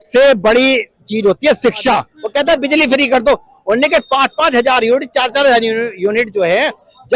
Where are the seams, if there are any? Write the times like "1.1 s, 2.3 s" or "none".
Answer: 2.2 s